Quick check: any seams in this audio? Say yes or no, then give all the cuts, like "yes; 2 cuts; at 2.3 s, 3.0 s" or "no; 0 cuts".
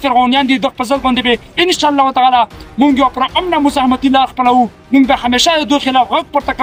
no; 0 cuts